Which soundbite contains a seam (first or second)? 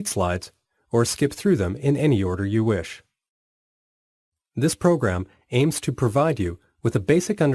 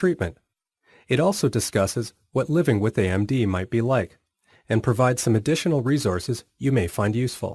second